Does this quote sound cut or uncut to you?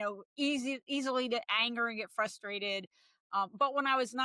uncut